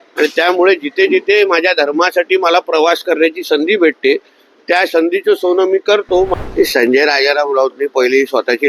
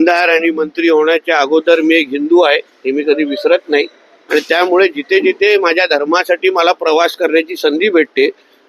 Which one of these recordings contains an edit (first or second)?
first